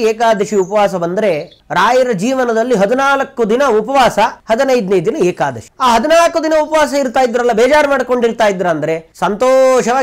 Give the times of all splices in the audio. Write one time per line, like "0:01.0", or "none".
0:04.4
0:05.7